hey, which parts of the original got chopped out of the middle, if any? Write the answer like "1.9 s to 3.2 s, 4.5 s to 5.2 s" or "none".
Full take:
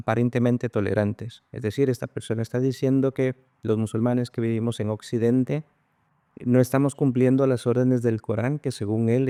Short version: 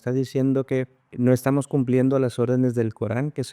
3.5 s to 6.3 s